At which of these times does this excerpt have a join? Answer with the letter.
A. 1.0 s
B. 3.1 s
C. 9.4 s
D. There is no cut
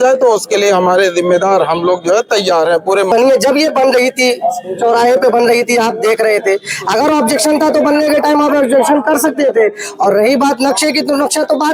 B